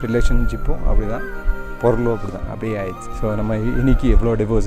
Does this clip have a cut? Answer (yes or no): yes